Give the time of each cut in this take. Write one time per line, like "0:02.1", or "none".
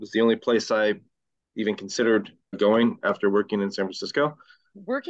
0:02.6
0:04.3

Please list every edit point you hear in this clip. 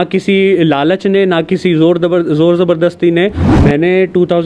0:03.5

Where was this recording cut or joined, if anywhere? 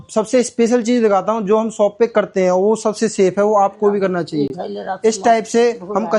none

